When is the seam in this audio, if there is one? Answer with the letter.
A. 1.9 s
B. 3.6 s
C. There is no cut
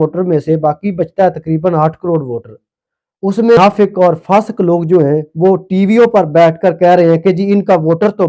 B